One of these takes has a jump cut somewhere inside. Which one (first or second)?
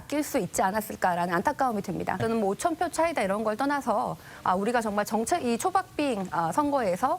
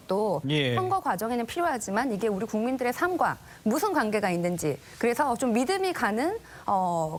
first